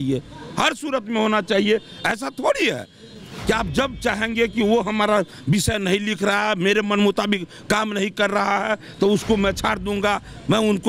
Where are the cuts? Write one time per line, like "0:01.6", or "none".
none